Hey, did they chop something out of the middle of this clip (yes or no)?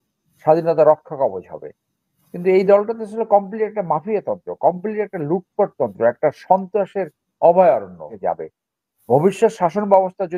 yes